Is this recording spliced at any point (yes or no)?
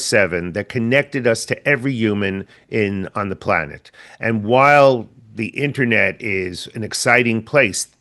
no